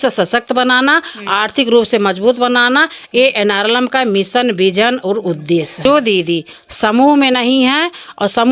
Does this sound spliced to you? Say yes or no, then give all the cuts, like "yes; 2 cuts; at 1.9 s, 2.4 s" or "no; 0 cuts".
yes; 1 cut; at 5.7 s